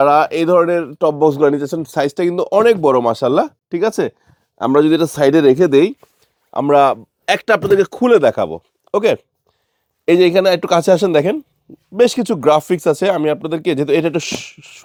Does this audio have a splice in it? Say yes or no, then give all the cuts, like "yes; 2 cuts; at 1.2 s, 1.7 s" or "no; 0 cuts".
no; 0 cuts